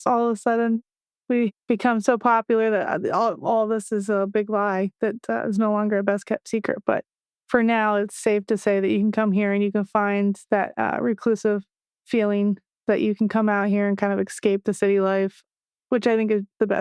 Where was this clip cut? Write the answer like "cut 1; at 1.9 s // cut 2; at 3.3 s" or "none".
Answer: none